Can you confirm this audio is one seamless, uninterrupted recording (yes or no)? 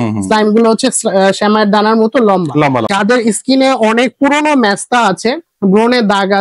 no